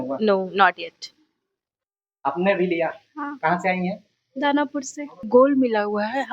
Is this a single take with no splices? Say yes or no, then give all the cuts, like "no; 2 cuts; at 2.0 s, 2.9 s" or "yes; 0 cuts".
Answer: no; 1 cut; at 5.3 s